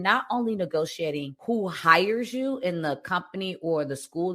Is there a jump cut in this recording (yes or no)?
yes